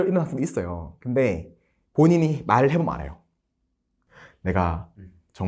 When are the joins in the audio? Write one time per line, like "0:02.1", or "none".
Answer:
0:04.0